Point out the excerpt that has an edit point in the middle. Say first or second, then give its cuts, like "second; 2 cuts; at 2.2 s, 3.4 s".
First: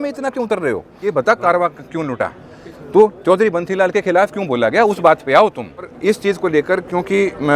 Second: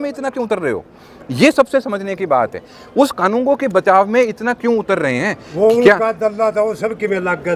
first; 2 cuts; at 1.0 s, 5.9 s